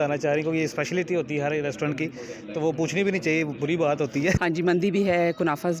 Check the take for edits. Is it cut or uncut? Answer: cut